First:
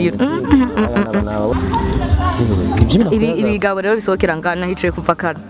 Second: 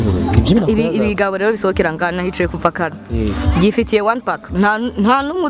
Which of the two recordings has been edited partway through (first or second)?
first